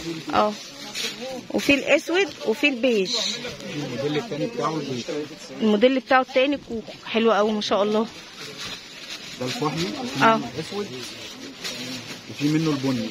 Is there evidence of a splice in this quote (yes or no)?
no